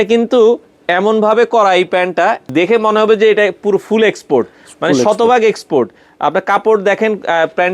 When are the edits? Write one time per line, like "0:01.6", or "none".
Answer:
0:02.5